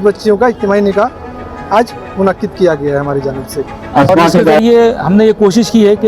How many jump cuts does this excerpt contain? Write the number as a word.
one